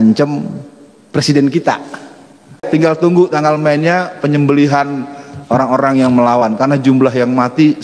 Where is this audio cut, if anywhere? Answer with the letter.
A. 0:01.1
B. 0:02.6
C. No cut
B